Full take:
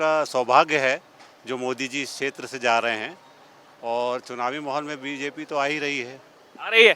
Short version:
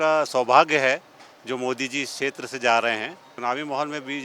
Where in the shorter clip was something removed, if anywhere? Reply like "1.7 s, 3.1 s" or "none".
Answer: 3.3 s